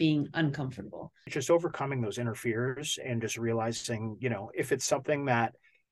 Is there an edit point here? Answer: yes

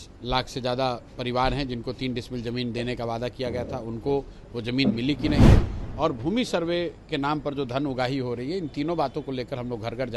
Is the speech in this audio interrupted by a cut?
no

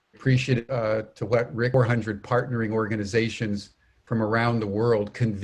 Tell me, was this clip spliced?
no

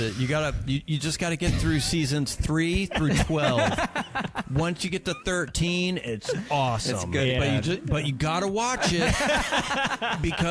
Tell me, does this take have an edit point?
no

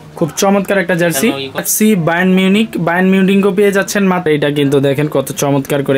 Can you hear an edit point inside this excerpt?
yes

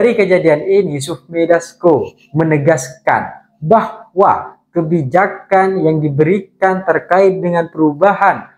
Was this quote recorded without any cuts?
yes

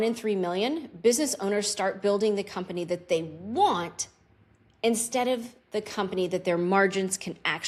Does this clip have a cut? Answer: no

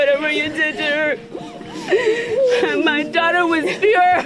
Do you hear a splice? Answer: no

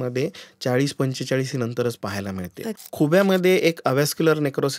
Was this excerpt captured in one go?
no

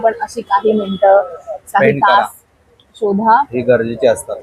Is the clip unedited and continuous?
yes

